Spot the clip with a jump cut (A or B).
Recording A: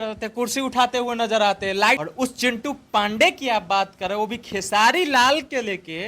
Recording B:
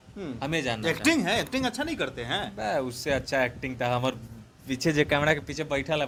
A